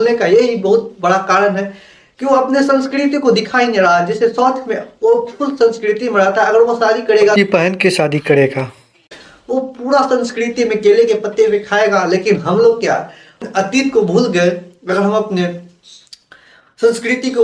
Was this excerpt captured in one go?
no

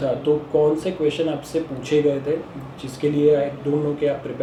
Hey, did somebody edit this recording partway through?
no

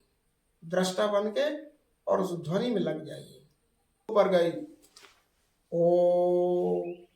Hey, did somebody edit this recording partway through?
yes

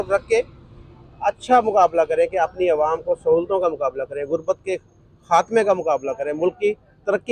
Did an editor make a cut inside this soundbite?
no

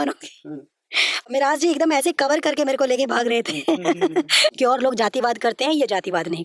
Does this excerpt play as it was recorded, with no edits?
no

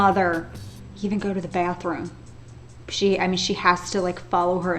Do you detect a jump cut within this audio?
no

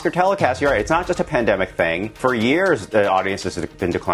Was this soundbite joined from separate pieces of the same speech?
yes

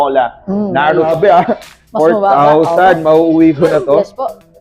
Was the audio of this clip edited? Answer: yes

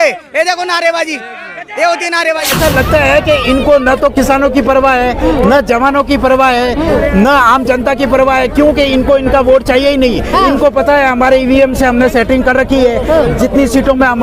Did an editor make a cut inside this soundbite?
yes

